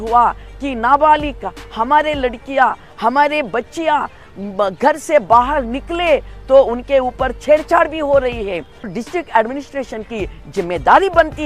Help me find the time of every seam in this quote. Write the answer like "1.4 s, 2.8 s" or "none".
8.9 s